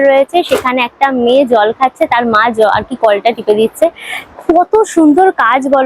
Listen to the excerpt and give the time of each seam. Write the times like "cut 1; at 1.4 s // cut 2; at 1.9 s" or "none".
none